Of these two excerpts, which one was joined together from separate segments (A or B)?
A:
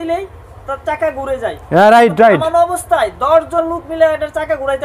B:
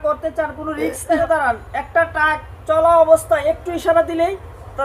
B